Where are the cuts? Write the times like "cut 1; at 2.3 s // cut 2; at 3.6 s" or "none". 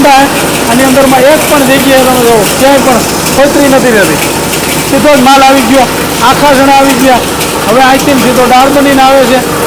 none